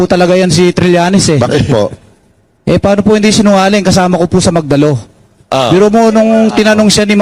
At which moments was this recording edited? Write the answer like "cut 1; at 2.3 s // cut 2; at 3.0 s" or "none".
none